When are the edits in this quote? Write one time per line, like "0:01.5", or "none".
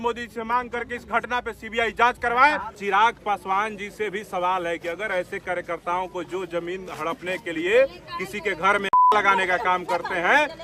0:02.8